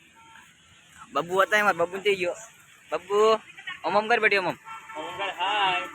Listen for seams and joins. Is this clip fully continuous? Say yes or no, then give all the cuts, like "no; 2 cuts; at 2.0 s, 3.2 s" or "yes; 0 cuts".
yes; 0 cuts